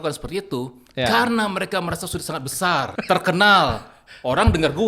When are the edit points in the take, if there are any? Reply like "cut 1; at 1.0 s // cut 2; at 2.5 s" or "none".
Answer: cut 1; at 2.9 s